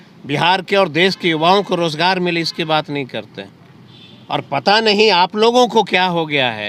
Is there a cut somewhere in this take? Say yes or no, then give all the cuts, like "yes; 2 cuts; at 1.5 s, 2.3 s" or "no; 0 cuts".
no; 0 cuts